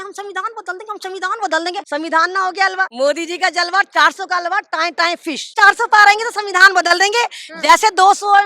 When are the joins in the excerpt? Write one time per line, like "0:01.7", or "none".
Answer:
0:01.8
0:02.9
0:05.5